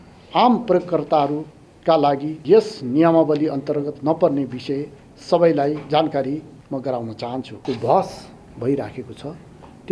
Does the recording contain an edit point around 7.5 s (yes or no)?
yes